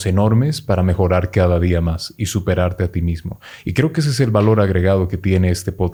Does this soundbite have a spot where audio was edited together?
no; 0 cuts

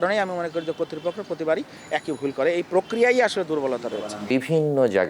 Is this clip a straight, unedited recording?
no; 1 cut; at 4.2 s

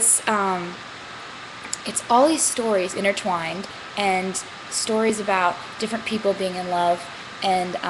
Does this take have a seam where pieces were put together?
no; 0 cuts

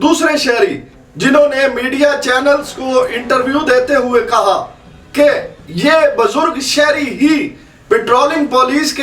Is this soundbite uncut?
yes; 0 cuts

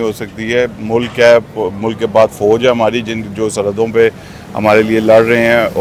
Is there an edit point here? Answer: no; 0 cuts

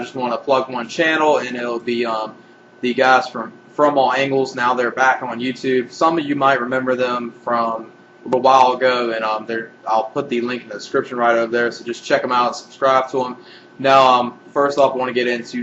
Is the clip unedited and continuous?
no; 1 cut; at 14.7 s

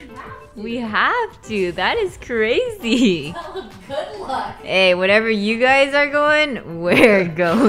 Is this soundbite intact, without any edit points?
yes; 0 cuts

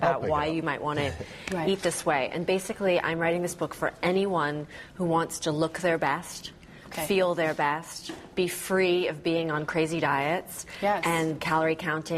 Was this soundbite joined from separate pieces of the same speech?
no; 0 cuts

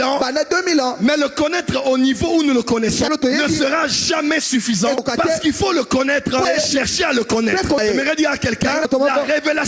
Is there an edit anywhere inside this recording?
yes; 5 cuts; at 3.1 s, 5.0 s, 6.4 s, 7.8 s, 8.9 s

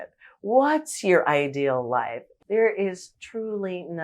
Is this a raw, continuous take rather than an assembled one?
no; 1 cut; at 2.2 s

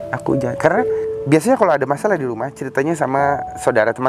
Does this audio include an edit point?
yes; 1 cut; at 1.1 s

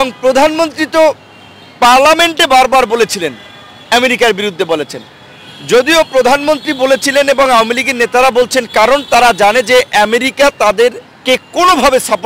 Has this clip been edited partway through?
no; 0 cuts

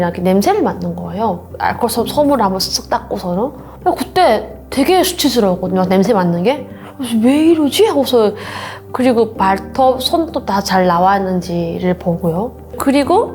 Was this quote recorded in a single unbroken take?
yes; 0 cuts

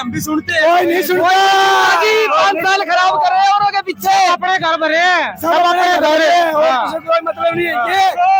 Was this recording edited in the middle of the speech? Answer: no; 0 cuts

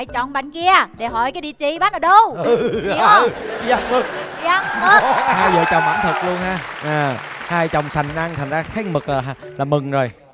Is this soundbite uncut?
yes; 0 cuts

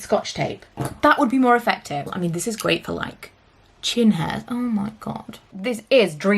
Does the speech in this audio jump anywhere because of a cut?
yes; 2 cuts; at 2.1 s, 5.5 s

